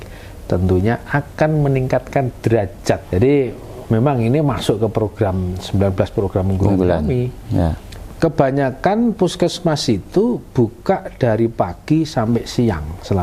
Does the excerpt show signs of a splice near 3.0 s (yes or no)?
yes